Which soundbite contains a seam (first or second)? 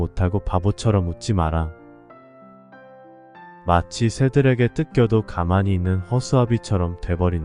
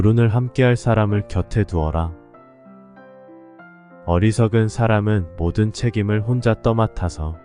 second